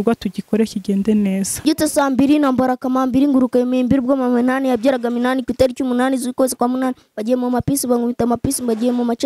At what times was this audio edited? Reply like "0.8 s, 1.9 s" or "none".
1.6 s